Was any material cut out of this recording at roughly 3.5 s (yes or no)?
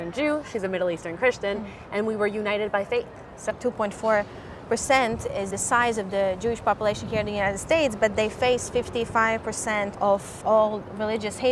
yes